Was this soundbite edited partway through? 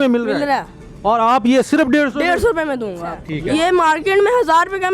yes; 1 cut; at 3.3 s

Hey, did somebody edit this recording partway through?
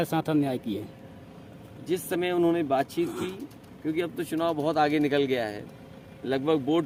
no; 0 cuts

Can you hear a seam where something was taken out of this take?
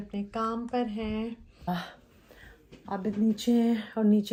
no; 0 cuts

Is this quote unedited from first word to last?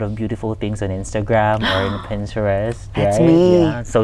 yes; 0 cuts

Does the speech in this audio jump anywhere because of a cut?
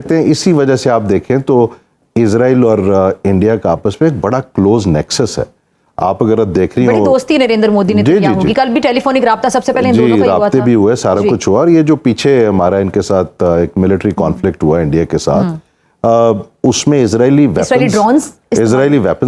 no; 0 cuts

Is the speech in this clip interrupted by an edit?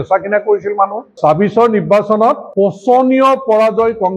yes; 2 cuts; at 1.2 s, 2.4 s

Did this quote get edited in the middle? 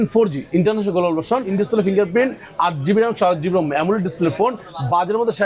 yes; 1 cut; at 1.5 s

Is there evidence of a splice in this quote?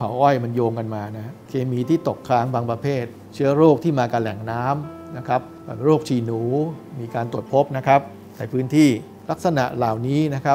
no; 0 cuts

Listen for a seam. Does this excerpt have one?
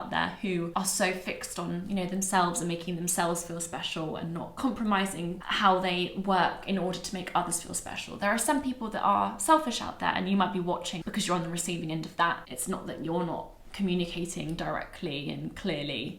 no; 0 cuts

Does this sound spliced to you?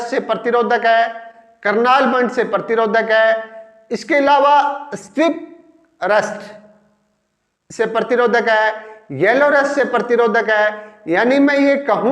no; 0 cuts

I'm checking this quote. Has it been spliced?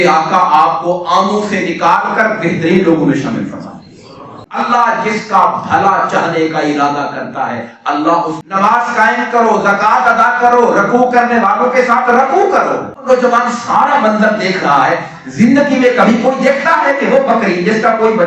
yes; 3 cuts; at 4.4 s, 8.4 s, 13.0 s

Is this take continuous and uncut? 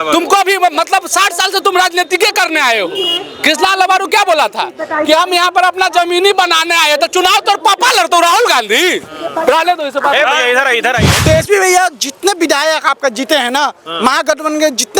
no; 1 cut; at 11.1 s

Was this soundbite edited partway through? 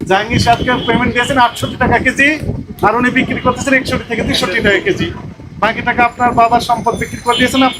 no; 0 cuts

